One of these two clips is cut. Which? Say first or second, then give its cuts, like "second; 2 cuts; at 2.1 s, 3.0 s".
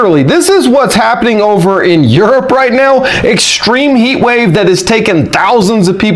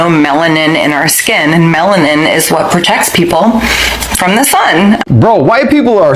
second; 1 cut; at 5.0 s